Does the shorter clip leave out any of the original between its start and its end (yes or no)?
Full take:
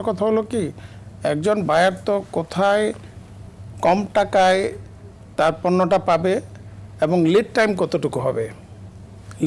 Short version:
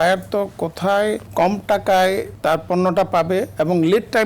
yes